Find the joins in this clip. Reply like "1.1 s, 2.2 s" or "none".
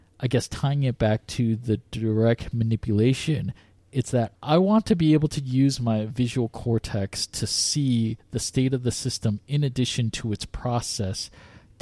4.3 s